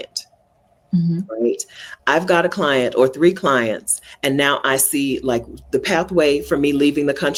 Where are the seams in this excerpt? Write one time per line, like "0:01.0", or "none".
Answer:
none

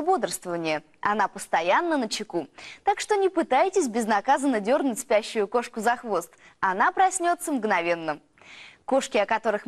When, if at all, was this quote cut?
none

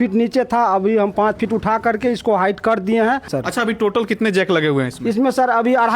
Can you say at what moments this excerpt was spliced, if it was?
0:03.3

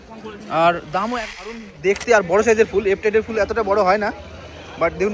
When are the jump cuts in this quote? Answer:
0:01.7

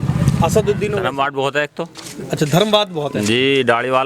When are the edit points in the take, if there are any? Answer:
0:01.0

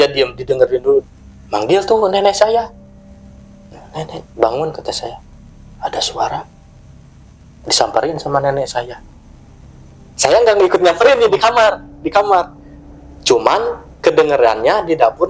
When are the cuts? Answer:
0:01.0

